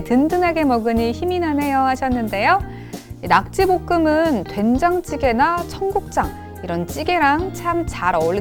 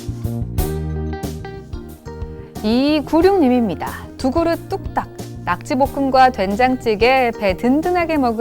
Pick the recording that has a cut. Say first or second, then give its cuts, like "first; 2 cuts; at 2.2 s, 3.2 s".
second; 2 cuts; at 1.2 s, 2.6 s